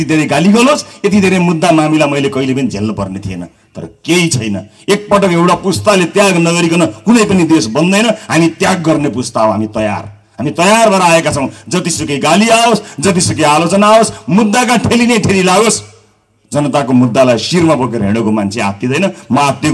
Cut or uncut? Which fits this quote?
uncut